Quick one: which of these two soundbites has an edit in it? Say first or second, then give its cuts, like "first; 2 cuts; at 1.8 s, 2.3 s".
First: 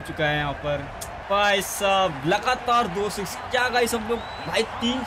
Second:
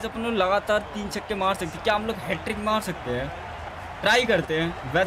first; 1 cut; at 1.2 s